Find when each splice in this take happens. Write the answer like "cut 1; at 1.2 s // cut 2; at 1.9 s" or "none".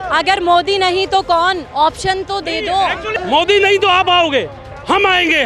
cut 1; at 3.1 s